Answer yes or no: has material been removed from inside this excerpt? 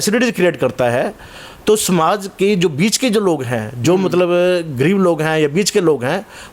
no